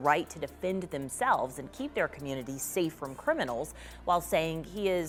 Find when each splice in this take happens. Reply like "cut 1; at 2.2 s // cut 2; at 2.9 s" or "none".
none